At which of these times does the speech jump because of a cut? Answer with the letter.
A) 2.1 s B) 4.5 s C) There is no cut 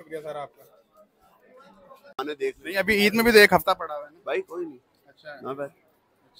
A